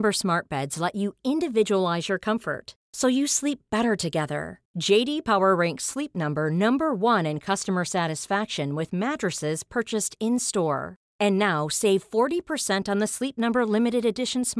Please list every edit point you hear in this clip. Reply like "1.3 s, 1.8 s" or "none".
none